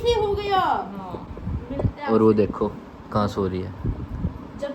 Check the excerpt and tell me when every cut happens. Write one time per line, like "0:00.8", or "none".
none